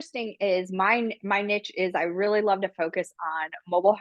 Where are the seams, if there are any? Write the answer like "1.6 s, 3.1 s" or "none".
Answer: none

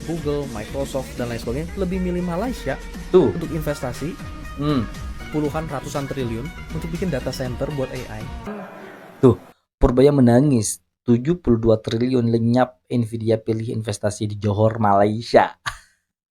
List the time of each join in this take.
8.6 s

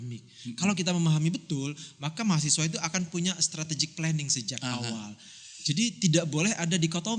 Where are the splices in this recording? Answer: none

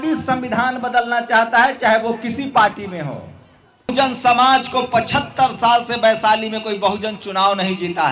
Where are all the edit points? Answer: 3.9 s

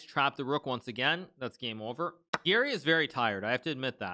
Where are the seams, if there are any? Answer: 2.2 s

